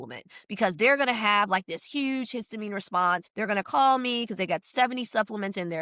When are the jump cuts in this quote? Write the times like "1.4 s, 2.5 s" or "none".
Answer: 3.3 s